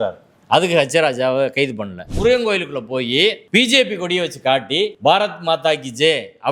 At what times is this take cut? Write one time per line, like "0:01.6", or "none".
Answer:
0:02.1
0:04.9